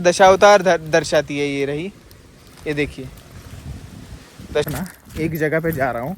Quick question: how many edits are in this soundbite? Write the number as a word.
one